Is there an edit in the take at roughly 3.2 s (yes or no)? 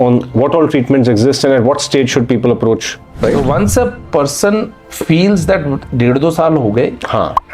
yes